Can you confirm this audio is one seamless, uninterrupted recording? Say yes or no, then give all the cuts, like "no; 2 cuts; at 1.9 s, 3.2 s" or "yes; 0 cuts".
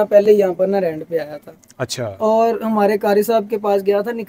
yes; 0 cuts